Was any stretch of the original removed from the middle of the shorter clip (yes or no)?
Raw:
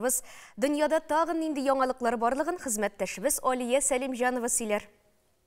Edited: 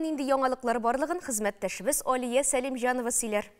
no